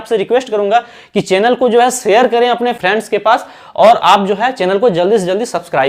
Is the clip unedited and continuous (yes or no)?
yes